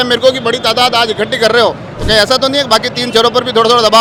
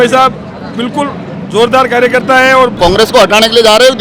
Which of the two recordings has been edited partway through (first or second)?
second